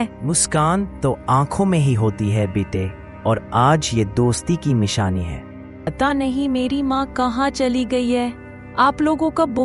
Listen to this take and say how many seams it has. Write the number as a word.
one